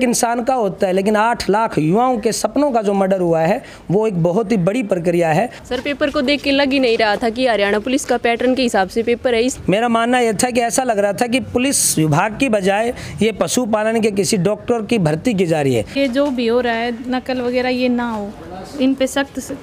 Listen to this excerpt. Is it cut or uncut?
cut